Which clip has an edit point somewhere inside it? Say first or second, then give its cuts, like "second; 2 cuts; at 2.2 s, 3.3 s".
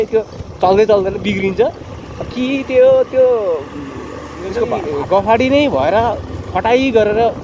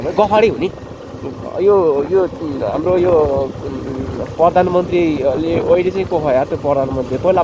first; 1 cut; at 4.8 s